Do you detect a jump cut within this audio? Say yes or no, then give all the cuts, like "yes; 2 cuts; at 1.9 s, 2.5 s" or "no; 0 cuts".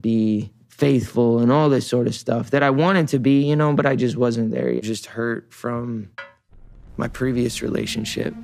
yes; 1 cut; at 4.8 s